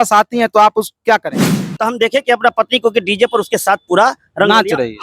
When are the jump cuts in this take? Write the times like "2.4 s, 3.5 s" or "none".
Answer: 1.7 s

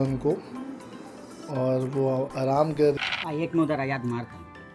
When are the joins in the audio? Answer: 3.0 s

